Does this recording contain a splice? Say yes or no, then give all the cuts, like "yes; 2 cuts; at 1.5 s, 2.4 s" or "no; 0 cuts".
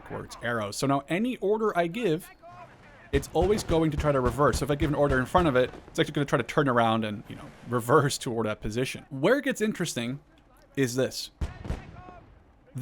yes; 1 cut; at 9.0 s